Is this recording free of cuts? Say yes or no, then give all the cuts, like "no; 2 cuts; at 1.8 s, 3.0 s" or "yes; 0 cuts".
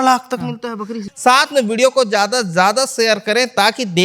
no; 1 cut; at 1.0 s